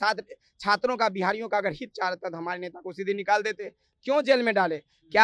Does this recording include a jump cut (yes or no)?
no